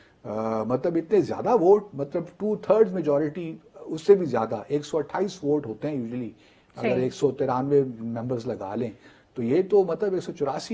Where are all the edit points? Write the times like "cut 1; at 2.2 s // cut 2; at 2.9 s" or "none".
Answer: none